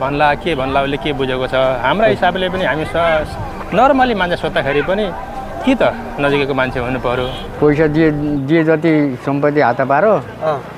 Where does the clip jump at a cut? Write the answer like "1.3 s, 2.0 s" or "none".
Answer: 7.4 s